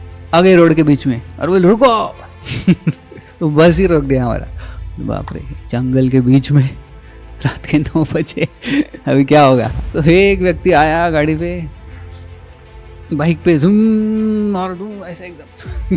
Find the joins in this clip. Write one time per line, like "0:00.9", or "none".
0:09.7